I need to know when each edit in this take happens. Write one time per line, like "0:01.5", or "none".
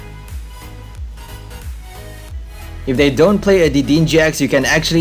none